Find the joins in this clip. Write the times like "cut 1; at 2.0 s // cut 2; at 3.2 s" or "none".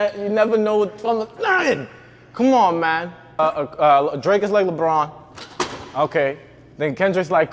cut 1; at 3.4 s